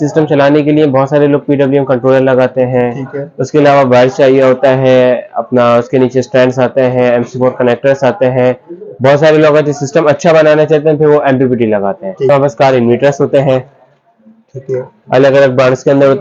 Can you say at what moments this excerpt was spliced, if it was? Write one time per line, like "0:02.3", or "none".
0:12.3